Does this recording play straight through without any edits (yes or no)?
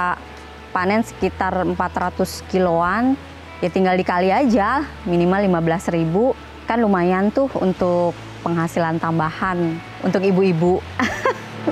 yes